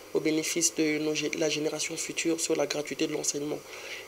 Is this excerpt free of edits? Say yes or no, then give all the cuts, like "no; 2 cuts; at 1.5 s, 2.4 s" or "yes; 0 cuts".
yes; 0 cuts